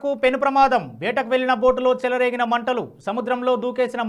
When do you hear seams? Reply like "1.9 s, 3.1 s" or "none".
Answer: none